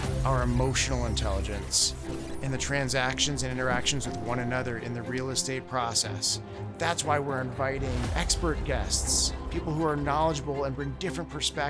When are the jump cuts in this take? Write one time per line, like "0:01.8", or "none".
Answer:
none